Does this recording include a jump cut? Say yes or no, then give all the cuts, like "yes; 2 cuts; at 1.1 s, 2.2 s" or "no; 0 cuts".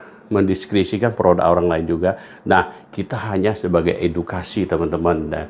no; 0 cuts